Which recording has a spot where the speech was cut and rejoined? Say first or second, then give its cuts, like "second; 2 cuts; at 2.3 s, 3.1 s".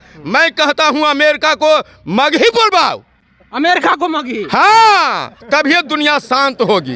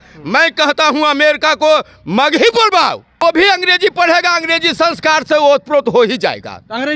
second; 1 cut; at 3.1 s